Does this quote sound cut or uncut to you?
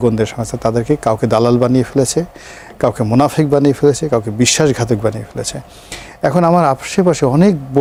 uncut